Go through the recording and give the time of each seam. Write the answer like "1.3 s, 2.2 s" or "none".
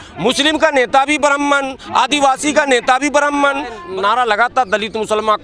3.8 s